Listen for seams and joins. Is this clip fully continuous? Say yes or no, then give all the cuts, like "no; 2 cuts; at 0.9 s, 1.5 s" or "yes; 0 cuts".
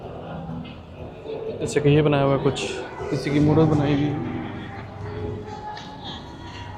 yes; 0 cuts